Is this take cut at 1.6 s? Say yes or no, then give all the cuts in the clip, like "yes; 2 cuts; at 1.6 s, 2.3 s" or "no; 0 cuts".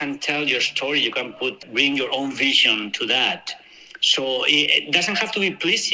yes; 1 cut; at 1.6 s